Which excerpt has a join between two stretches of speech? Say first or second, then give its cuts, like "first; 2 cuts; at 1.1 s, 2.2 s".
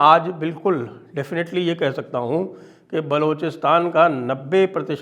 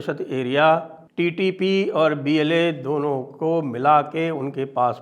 second; 1 cut; at 1.0 s